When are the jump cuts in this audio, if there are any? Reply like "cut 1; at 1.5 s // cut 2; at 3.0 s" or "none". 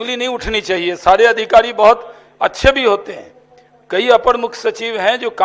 none